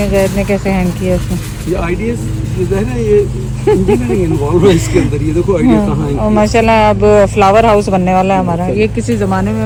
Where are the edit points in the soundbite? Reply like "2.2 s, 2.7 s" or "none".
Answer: none